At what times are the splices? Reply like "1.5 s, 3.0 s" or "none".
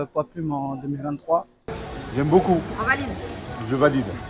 1.8 s